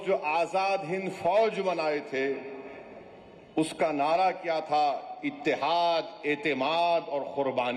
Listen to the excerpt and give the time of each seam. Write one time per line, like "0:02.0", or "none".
none